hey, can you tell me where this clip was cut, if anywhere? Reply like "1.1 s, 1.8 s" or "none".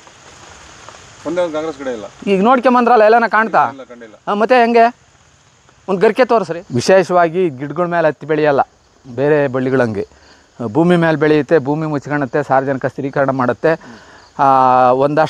6.5 s